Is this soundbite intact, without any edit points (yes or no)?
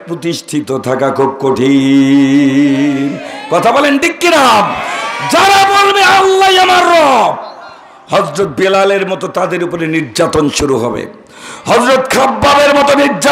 yes